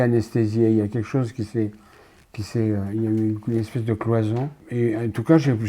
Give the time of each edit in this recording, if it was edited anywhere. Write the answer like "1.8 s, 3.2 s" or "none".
4.6 s